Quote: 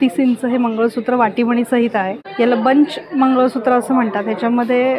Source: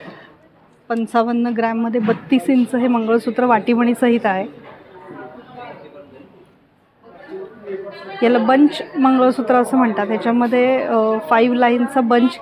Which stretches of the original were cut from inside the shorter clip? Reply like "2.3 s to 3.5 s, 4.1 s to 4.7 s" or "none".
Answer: 4.5 s to 8.0 s